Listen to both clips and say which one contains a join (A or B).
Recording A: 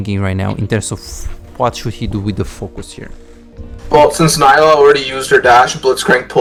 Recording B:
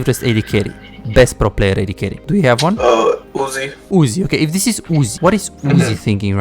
B